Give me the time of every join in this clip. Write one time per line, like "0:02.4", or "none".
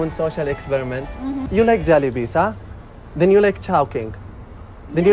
0:01.5